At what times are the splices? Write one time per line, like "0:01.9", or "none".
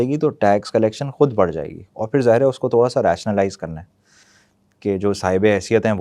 none